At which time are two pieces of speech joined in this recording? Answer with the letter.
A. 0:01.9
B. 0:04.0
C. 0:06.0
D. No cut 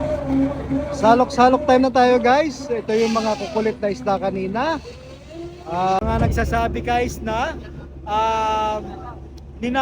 C